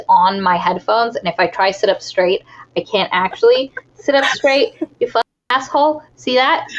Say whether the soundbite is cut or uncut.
uncut